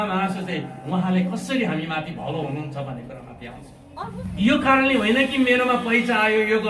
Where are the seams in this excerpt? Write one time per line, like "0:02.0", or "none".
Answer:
0:04.1